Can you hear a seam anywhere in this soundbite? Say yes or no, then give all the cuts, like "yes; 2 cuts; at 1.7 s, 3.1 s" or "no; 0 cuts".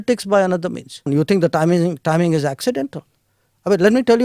yes; 1 cut; at 1.1 s